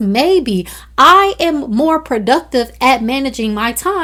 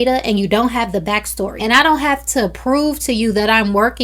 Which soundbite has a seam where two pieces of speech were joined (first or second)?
second